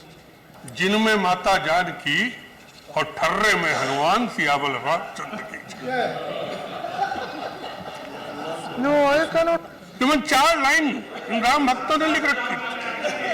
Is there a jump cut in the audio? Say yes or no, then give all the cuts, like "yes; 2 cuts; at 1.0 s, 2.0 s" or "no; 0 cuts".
no; 0 cuts